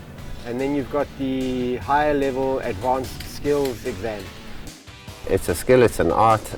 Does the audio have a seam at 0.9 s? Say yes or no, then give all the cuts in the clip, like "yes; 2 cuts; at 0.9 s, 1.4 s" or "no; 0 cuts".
no; 1 cut; at 4.8 s